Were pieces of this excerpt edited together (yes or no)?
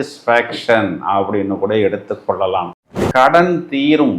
yes